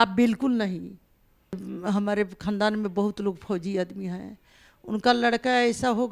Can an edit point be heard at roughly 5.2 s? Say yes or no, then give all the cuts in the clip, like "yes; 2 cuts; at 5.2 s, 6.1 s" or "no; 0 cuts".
no; 1 cut; at 1.6 s